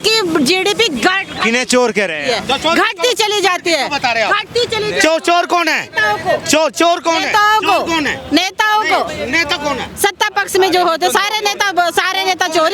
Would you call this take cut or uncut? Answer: uncut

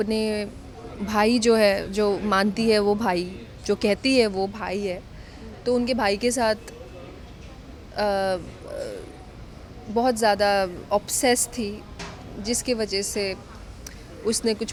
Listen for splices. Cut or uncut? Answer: uncut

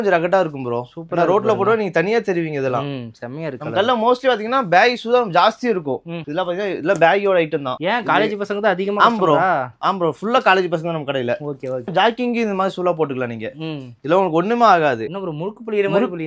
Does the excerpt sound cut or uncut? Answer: uncut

